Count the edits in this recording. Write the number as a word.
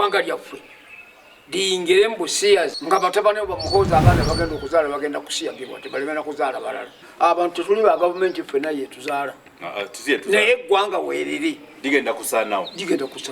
two